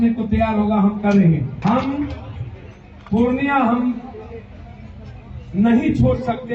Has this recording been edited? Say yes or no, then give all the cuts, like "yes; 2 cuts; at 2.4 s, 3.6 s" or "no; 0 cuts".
yes; 1 cut; at 1.5 s